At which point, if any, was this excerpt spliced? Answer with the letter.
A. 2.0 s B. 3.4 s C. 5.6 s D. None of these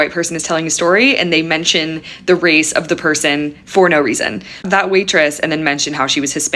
D